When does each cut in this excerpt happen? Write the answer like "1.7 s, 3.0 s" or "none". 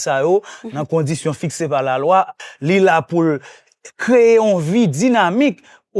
2.4 s